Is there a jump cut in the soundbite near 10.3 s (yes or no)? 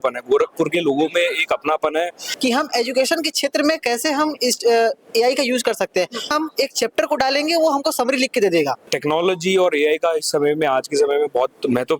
no